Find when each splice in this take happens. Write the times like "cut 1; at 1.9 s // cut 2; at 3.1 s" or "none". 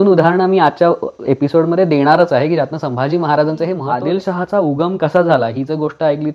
cut 1; at 3.8 s